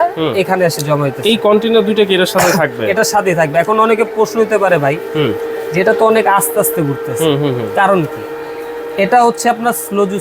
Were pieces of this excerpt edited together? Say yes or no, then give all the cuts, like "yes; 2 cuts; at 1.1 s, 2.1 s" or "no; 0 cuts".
no; 0 cuts